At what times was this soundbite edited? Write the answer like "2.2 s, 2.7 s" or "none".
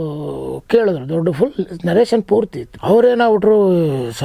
2.6 s